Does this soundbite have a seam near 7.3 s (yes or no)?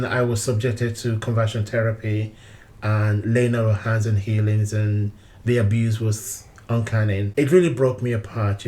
yes